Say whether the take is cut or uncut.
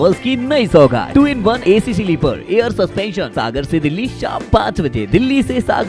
cut